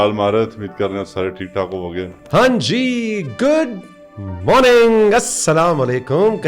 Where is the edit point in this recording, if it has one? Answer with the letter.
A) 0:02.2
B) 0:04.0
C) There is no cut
A